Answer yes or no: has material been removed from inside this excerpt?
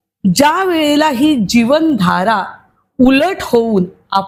no